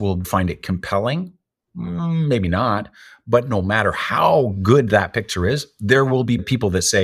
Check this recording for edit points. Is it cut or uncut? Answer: uncut